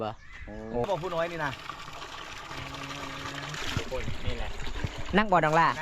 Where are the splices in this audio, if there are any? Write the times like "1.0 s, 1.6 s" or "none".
0.9 s, 3.6 s